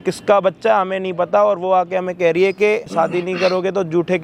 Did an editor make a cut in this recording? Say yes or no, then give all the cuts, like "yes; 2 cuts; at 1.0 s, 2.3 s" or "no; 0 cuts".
yes; 1 cut; at 2.9 s